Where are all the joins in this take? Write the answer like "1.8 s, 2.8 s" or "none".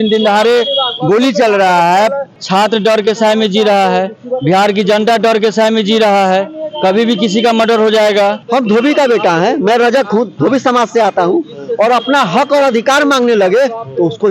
2.4 s, 8.4 s